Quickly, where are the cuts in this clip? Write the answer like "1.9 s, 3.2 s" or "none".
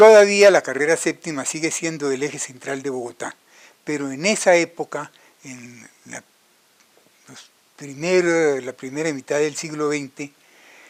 none